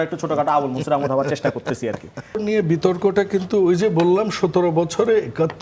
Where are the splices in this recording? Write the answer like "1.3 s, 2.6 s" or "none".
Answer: 2.4 s